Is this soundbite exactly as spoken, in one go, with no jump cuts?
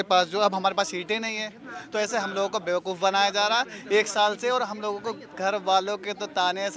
yes; 0 cuts

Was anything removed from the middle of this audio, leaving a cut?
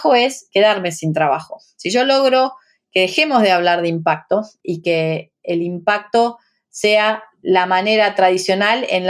yes; 2 cuts; at 4.6 s, 7.3 s

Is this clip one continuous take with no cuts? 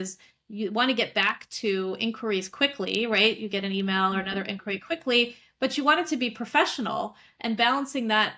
yes; 0 cuts

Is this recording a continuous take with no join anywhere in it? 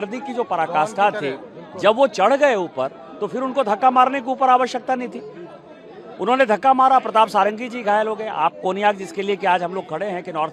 yes; 0 cuts

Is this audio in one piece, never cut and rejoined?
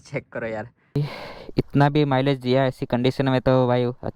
no; 1 cut; at 1.0 s

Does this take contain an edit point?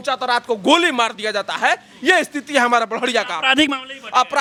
no; 0 cuts

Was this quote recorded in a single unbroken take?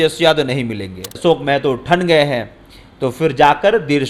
no; 1 cut; at 1.1 s

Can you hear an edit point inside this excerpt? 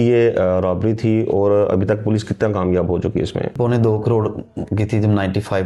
yes; 1 cut; at 3.6 s

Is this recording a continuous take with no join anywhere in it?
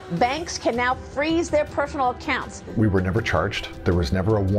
no; 2 cuts; at 2.6 s, 3.6 s

